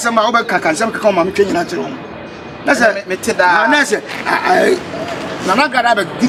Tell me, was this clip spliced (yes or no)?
no